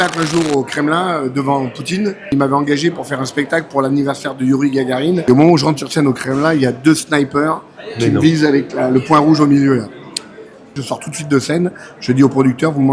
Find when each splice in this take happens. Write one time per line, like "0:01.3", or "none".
0:02.3
0:05.2
0:10.8